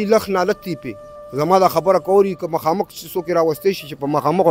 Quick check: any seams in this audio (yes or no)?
yes